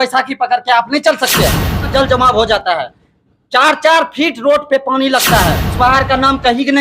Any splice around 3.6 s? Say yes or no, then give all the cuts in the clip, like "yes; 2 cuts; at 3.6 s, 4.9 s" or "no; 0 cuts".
no; 2 cuts; at 1.9 s, 5.6 s